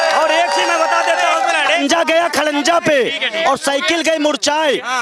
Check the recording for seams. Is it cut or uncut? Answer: cut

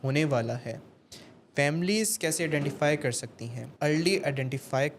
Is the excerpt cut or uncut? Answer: cut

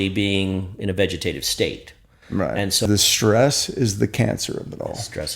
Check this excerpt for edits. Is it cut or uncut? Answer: cut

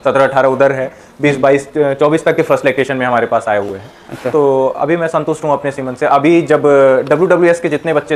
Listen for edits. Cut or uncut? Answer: uncut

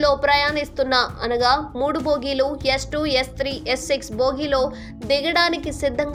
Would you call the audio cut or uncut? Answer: uncut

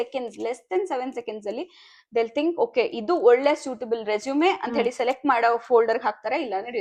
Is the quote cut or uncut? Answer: uncut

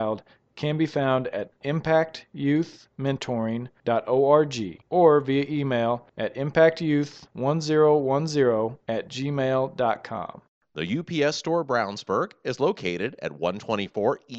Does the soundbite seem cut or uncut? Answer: cut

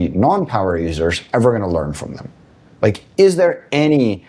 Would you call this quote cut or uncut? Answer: uncut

